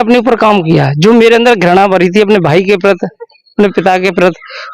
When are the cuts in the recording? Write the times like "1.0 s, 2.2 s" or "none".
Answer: none